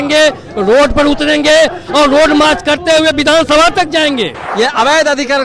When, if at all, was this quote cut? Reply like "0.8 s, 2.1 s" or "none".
4.4 s

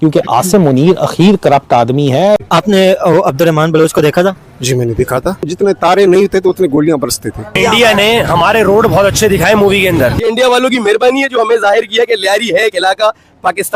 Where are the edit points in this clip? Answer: 2.4 s, 5.5 s, 7.5 s, 10.1 s

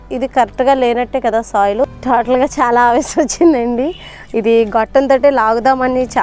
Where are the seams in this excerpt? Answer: 1.8 s

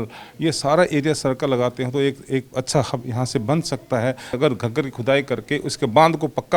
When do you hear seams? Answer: 4.3 s

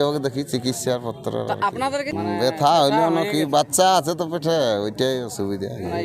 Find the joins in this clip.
2.1 s

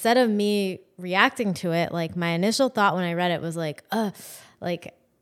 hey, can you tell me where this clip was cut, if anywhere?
none

